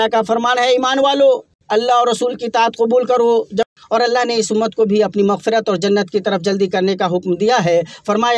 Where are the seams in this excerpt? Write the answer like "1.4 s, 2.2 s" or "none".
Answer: 1.5 s, 3.7 s